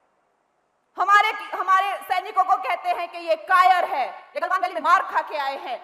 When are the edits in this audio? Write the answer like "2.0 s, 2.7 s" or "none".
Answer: none